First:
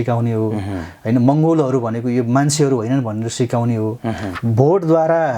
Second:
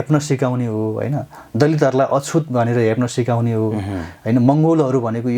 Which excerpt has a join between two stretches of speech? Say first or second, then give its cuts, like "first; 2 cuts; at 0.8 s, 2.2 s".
first; 1 cut; at 4.3 s